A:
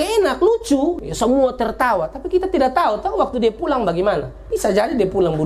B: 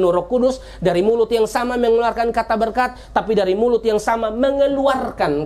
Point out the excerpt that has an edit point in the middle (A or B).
A